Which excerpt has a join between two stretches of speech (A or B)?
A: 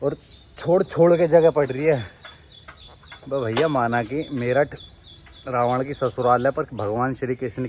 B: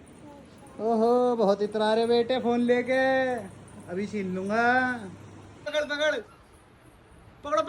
B